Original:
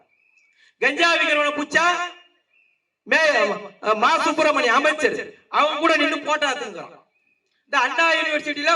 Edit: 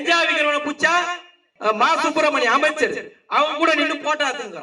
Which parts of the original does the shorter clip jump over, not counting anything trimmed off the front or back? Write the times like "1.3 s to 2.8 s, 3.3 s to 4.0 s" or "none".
2.4 s to 3.7 s

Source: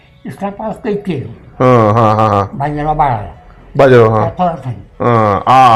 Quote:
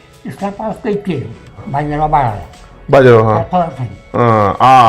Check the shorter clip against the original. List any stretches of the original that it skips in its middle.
1.6 s to 2.4 s

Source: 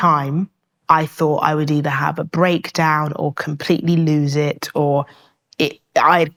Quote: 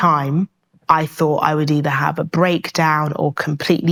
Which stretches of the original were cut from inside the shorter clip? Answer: none

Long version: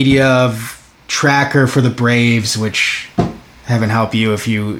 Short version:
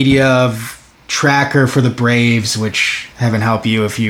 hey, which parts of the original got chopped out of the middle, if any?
3.0 s to 3.4 s

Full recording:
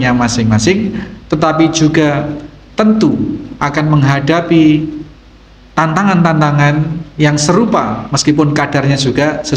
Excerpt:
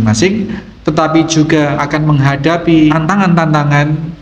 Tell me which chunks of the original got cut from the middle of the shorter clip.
2.3 s to 3.6 s, 4.8 s to 5.8 s

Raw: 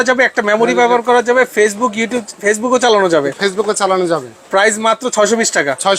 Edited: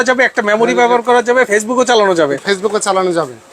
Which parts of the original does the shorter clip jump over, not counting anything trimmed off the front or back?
1.5 s to 2.4 s

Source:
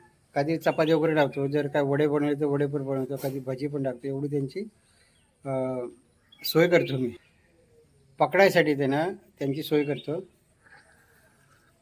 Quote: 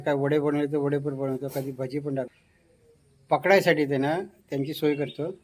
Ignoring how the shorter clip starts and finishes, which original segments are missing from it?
4.0 s to 7.2 s

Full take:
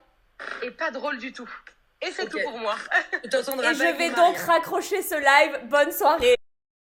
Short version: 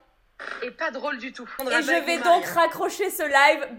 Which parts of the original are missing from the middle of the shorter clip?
1.6 s to 3.5 s

